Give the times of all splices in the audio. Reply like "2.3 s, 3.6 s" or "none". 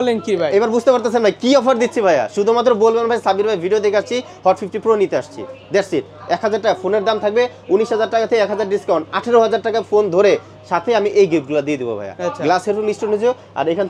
none